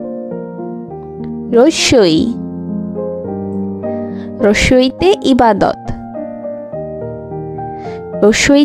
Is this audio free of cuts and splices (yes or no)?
no